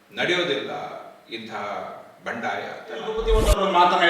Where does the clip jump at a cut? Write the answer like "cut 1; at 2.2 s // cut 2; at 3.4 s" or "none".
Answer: cut 1; at 3.2 s

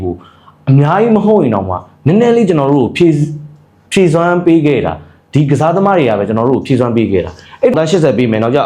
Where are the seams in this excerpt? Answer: cut 1; at 7.7 s

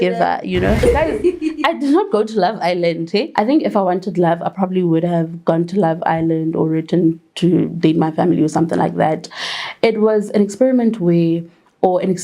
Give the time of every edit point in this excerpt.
cut 1; at 0.8 s // cut 2; at 3.3 s

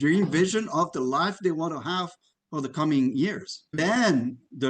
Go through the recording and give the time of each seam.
cut 1; at 3.7 s

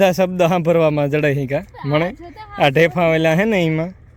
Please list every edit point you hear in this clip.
none

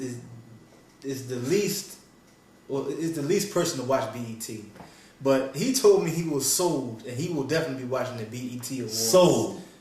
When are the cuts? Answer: cut 1; at 5.5 s

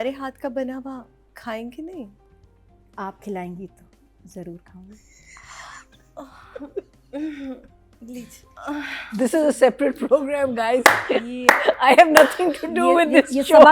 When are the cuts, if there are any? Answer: cut 1; at 8.4 s

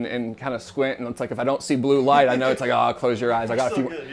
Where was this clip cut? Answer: none

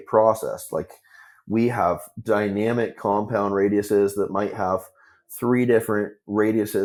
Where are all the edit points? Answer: none

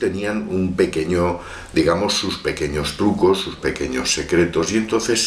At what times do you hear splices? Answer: none

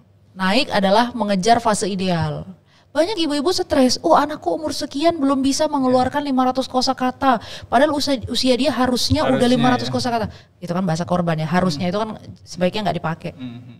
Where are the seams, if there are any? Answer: none

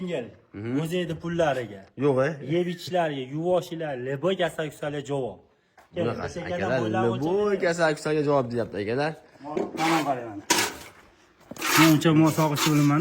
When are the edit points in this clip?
cut 1; at 9.5 s

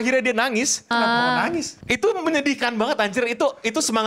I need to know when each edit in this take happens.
cut 1; at 0.9 s // cut 2; at 1.7 s

